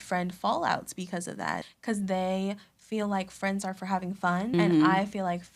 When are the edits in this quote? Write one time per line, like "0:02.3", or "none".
0:01.6
0:04.5